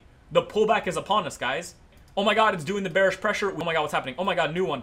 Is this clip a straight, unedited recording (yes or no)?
no